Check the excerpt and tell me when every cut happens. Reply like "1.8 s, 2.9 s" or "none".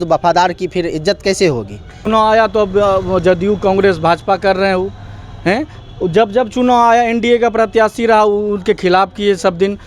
2.0 s